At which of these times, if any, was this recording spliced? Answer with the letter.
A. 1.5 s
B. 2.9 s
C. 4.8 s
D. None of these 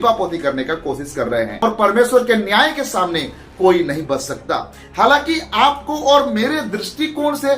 A